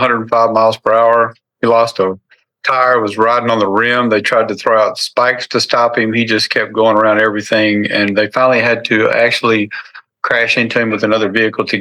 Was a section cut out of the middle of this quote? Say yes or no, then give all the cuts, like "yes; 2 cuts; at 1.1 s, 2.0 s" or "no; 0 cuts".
no; 0 cuts